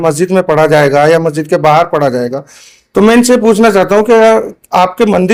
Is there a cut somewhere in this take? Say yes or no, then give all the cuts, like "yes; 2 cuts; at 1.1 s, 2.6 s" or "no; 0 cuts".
no; 0 cuts